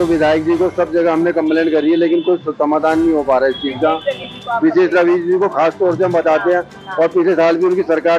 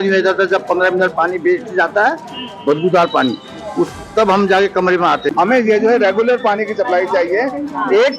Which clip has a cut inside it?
second; 1 cut; at 5.4 s

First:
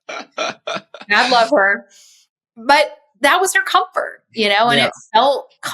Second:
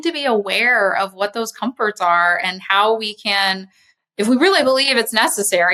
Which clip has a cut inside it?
first; 1 cut; at 3.0 s

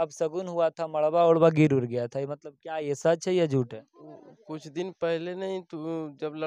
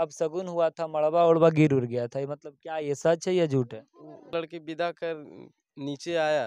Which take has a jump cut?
second; 1 cut; at 4.3 s

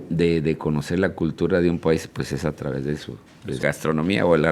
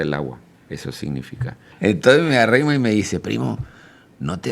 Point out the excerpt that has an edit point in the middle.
second; 1 cut; at 1.7 s

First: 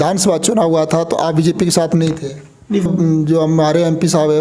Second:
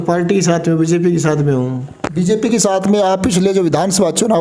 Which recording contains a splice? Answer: first; 1 cut; at 2.9 s

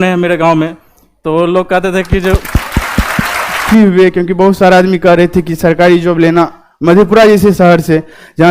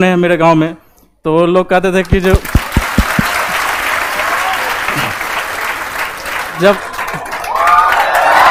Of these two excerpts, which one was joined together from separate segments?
first; 1 cut; at 3.7 s

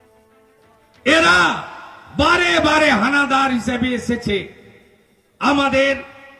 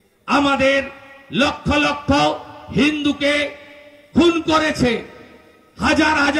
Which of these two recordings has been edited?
first; 1 cut; at 0.9 s

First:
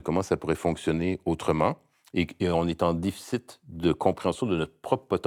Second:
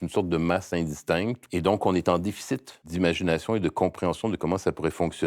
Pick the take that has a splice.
second; 2 cuts; at 1.4 s, 2.8 s

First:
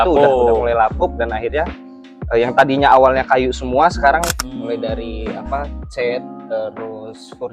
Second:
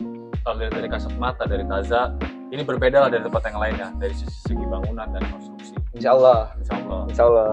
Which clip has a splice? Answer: first; 1 cut; at 4.4 s

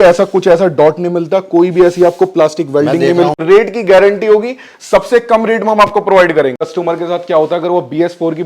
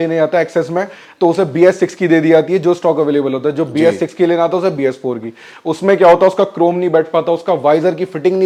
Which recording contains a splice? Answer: first; 2 cuts; at 3.4 s, 6.6 s

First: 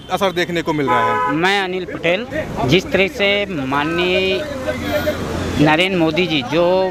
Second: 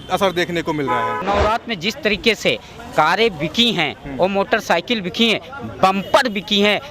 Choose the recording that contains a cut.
second; 1 cut; at 1.2 s

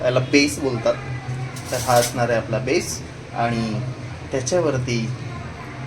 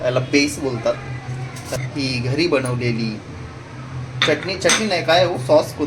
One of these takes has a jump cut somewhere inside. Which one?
second; 1 cut; at 1.8 s

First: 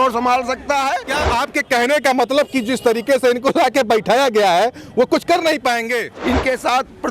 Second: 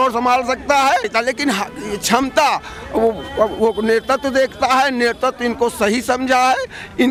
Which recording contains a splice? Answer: first; 2 cuts; at 1.1 s, 6.1 s

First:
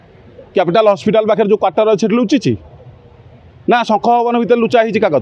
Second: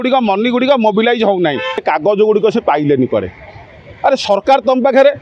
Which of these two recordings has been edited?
second; 1 cut; at 1.7 s

